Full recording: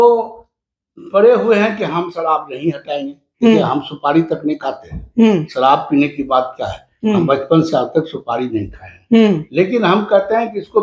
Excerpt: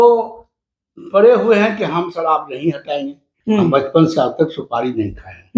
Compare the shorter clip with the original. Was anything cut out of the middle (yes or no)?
yes